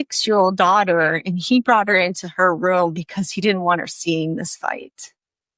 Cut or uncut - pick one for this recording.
uncut